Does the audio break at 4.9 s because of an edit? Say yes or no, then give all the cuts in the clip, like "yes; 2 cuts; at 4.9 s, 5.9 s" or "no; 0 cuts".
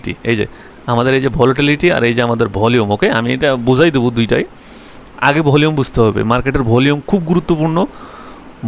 no; 0 cuts